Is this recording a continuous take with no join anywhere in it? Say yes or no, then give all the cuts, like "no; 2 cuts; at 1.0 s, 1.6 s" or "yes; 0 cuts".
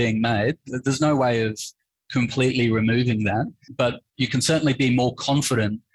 no; 1 cut; at 3.6 s